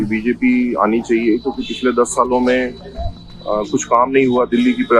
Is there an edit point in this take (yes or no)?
no